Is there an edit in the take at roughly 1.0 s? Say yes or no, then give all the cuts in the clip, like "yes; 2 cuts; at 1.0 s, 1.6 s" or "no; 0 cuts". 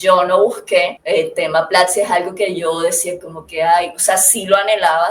yes; 1 cut; at 1.0 s